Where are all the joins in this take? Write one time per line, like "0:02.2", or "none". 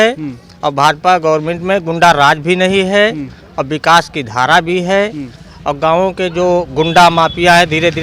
none